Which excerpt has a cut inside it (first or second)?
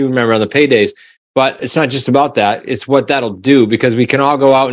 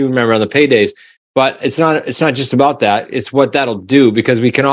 first